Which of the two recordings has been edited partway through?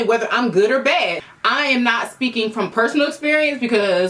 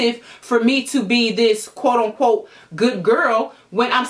first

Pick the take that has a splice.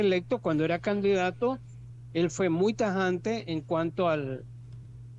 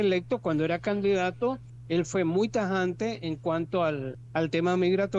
second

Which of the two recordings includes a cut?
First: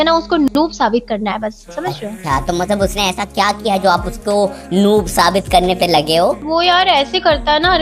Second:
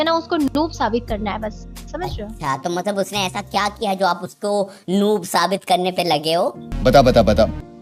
first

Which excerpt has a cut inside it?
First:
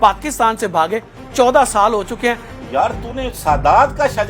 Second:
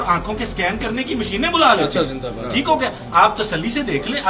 first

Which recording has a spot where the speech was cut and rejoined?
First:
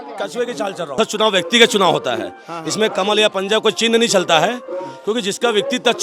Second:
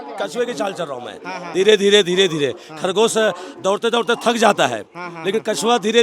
first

